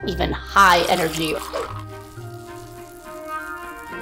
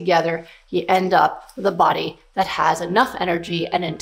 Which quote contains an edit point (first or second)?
first